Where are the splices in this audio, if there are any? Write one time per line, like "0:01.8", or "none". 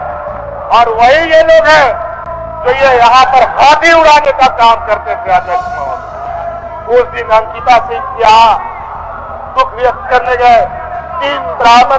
0:06.2